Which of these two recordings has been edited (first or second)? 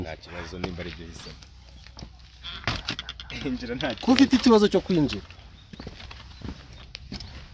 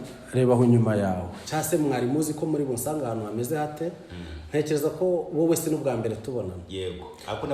second